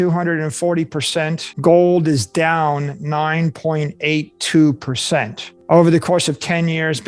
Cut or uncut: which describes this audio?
cut